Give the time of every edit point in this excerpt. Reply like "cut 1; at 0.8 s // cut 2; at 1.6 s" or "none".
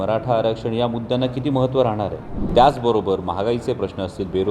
cut 1; at 2.3 s